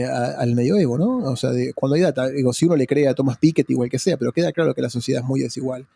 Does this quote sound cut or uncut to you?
uncut